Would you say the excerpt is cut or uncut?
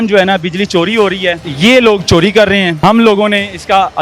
cut